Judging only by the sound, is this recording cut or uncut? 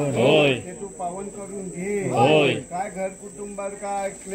uncut